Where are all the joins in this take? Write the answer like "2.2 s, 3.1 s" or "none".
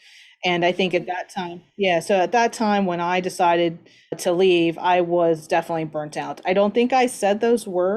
4.2 s